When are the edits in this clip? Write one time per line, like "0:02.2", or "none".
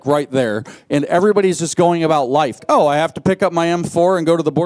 0:02.6